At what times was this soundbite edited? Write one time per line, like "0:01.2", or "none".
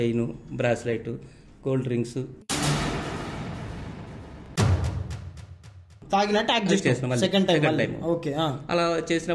0:06.0